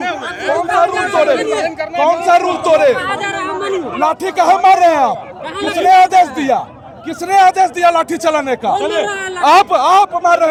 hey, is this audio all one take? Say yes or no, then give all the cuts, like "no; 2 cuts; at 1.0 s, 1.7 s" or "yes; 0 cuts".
yes; 0 cuts